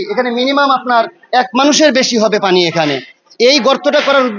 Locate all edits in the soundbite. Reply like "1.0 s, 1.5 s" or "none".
none